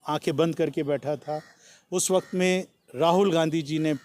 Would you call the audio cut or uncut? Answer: uncut